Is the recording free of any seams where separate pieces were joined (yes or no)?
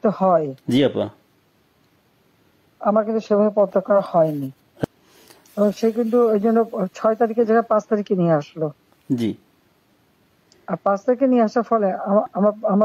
no